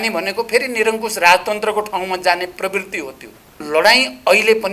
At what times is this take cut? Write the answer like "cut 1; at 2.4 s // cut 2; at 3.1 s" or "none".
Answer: cut 1; at 3.6 s